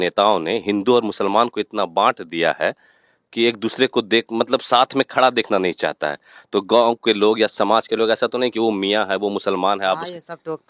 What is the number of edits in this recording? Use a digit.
0